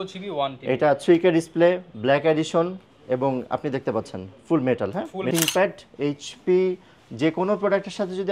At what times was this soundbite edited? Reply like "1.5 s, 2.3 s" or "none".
5.3 s

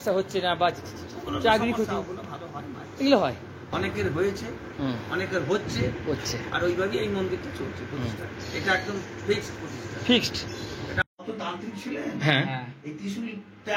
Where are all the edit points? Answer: 3.7 s, 11.0 s

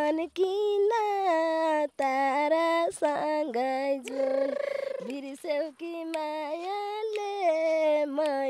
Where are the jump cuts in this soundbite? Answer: none

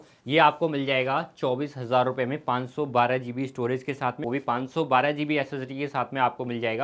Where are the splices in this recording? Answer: 4.2 s

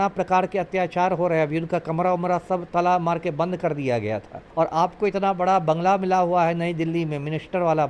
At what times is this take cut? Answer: 4.4 s

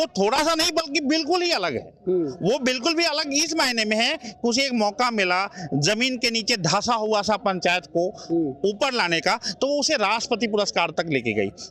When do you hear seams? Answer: none

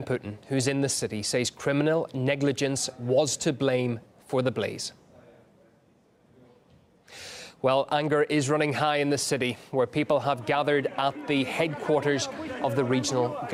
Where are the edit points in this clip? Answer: none

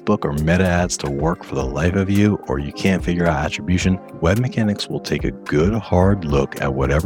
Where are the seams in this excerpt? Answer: none

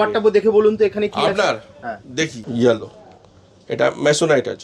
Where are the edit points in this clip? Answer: 2.4 s

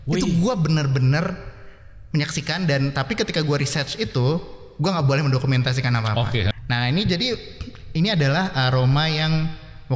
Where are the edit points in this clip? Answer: 6.5 s

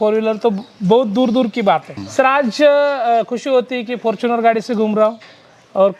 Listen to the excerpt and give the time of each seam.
2.0 s

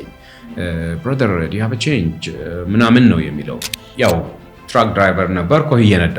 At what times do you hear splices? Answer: 3.8 s

